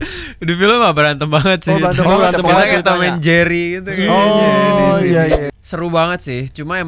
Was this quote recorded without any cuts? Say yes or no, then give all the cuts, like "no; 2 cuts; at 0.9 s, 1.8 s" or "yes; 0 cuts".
no; 1 cut; at 5.4 s